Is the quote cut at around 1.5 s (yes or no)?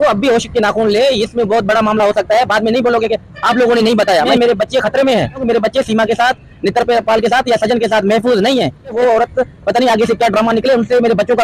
no